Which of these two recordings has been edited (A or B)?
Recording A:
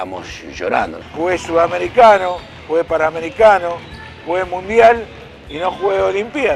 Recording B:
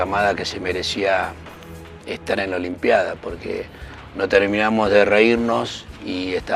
A